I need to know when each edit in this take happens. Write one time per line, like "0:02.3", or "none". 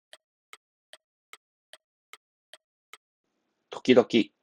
0:03.2